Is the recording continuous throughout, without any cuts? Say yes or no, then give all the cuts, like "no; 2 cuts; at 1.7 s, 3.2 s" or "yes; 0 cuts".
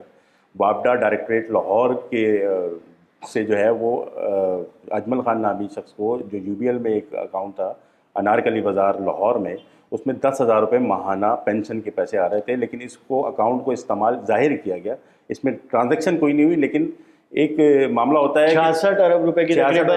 yes; 0 cuts